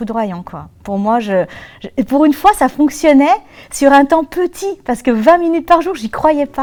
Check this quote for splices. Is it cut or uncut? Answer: uncut